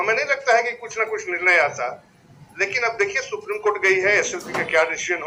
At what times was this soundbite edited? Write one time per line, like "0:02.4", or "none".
none